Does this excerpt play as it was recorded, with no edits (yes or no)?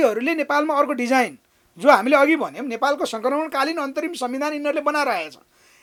yes